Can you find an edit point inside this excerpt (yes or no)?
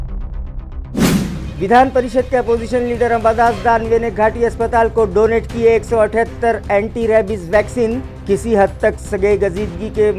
yes